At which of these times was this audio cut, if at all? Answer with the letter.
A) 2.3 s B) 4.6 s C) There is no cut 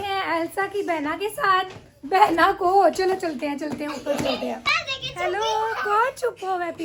C